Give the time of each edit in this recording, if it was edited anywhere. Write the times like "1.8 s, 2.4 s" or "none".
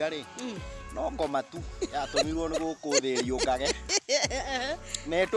none